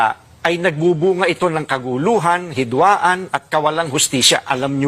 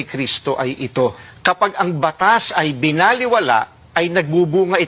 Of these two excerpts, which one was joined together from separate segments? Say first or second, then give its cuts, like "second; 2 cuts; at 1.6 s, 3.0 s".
second; 1 cut; at 1.6 s